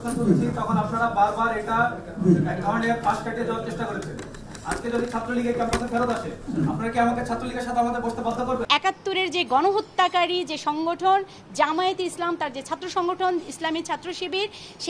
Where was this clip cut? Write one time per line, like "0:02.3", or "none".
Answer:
0:08.6